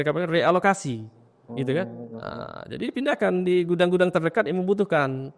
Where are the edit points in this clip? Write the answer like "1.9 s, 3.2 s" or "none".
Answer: none